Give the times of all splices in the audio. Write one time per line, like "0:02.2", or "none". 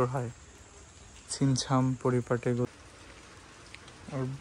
0:02.6

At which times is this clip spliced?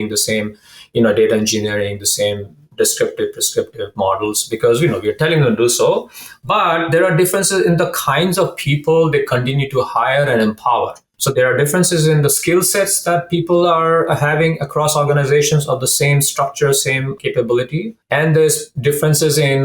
0:11.1
0:17.1
0:18.0

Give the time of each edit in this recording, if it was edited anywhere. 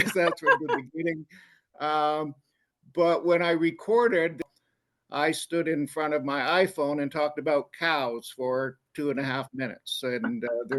0:04.4

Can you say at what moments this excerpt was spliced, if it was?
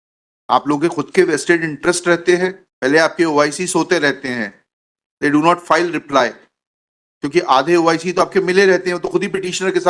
0:02.7

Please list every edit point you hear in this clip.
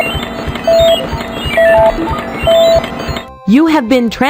0:01.2

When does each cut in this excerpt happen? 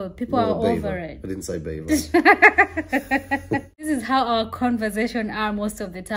0:03.9

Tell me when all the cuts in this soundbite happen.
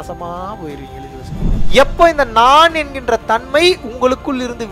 0:01.2

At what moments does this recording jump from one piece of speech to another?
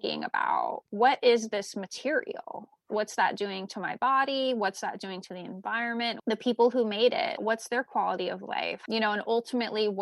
0:02.8
0:06.2
0:08.8

